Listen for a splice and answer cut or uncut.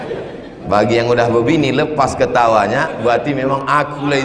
uncut